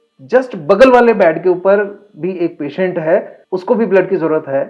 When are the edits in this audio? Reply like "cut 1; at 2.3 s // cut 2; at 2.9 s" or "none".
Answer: cut 1; at 3.4 s

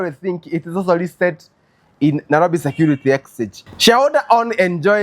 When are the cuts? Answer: cut 1; at 3.6 s

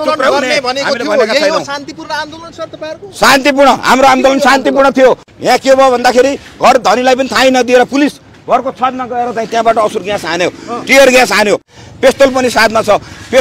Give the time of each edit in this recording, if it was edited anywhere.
cut 1; at 5.3 s // cut 2; at 11.7 s

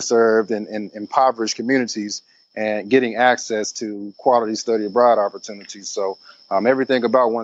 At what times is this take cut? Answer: none

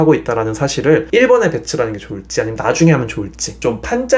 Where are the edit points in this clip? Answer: cut 1; at 1.1 s

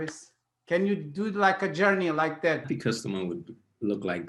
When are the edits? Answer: cut 1; at 2.7 s

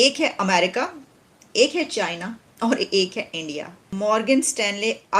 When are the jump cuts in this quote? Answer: cut 1; at 3.9 s

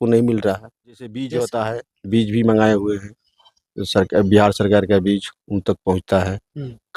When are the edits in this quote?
cut 1; at 1.1 s

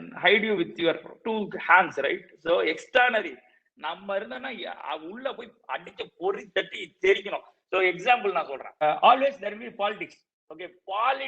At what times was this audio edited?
cut 1; at 8.8 s

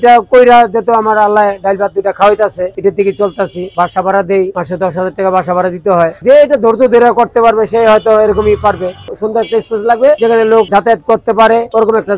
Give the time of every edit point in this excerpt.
cut 1; at 2.7 s // cut 2; at 6.2 s // cut 3; at 9.1 s

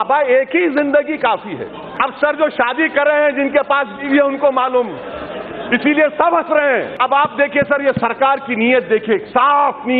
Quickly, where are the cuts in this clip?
cut 1; at 1.9 s // cut 2; at 6.9 s

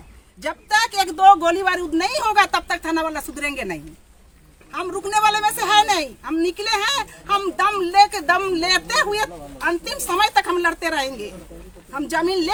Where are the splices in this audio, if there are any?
none

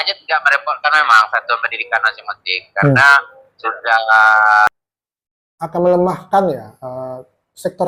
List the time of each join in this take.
cut 1; at 4.7 s

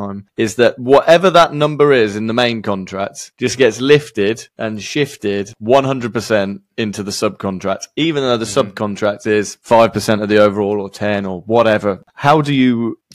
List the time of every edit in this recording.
cut 1; at 12.1 s

